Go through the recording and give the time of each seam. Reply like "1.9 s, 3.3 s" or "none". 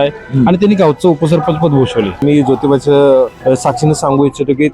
2.2 s, 3.4 s